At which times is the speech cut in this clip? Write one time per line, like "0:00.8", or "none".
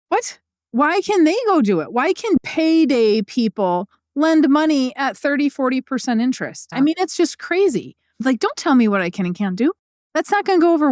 0:02.4
0:06.6
0:08.2
0:09.9